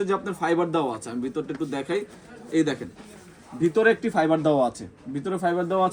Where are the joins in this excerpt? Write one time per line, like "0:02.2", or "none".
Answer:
none